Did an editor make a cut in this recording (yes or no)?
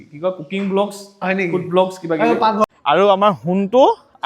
yes